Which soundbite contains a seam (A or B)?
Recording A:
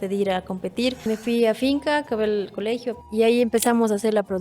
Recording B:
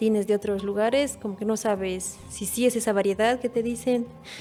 A